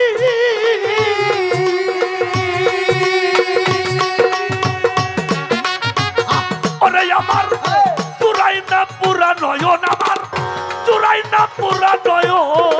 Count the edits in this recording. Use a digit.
0